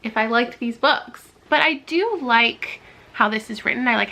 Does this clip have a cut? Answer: yes; 1 cut; at 1.3 s

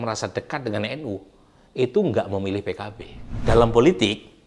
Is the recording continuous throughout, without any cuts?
no; 1 cut; at 3.4 s

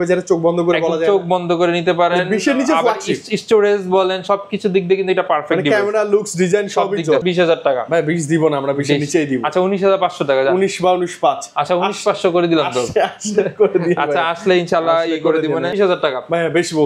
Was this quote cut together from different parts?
yes; 2 cuts; at 7.2 s, 15.7 s

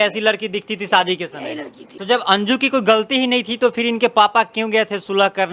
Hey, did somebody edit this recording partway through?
yes; 1 cut; at 1.8 s

